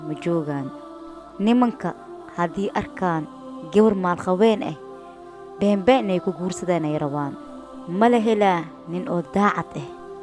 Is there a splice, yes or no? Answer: no